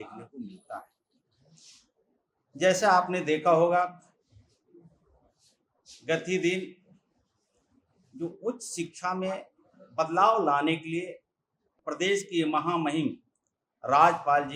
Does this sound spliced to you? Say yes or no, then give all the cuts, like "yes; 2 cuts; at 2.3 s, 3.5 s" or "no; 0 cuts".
no; 0 cuts